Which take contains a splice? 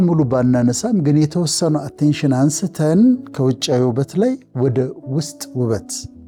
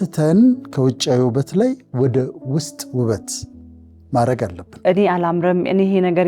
second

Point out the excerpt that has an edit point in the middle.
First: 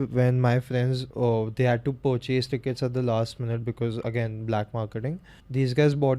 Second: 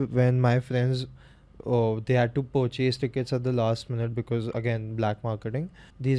first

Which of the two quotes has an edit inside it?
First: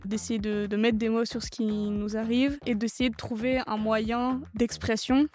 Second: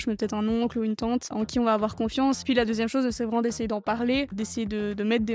second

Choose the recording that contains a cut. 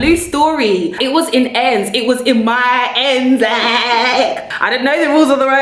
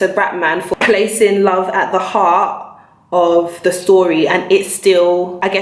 first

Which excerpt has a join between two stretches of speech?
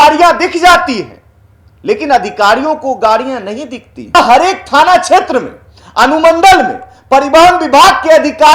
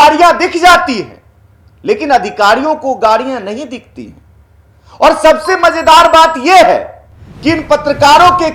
first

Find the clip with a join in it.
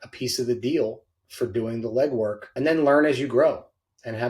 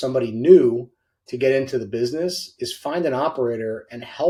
first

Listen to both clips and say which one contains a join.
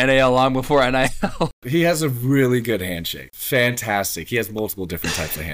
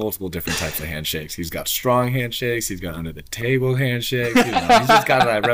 first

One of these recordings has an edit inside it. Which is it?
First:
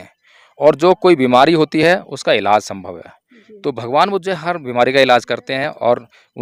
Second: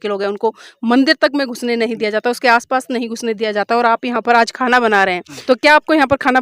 second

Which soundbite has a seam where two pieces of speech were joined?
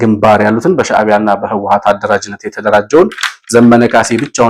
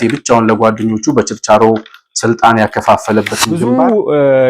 second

